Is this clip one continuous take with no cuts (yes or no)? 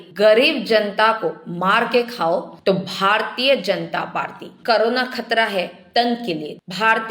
no